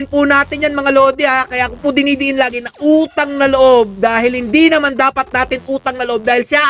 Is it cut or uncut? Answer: uncut